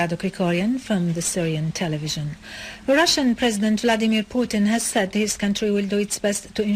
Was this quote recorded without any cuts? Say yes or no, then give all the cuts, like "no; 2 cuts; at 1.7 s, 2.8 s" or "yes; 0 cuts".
no; 1 cut; at 3.4 s